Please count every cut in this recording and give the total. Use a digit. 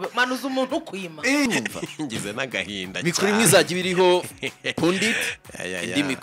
1